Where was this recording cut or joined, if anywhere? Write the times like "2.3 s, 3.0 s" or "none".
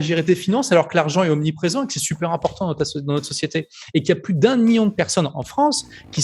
none